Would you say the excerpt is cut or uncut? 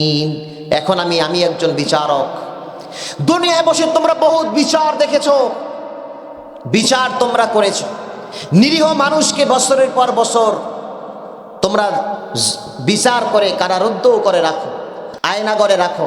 cut